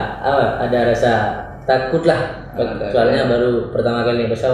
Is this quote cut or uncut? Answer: uncut